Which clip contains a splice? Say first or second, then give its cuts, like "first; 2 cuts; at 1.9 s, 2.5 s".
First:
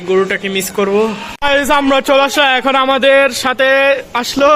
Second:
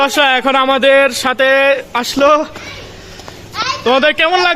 first; 1 cut; at 1.3 s